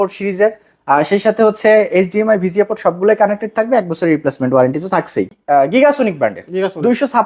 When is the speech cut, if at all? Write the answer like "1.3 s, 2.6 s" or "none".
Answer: 5.3 s